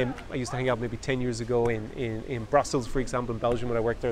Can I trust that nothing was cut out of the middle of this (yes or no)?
yes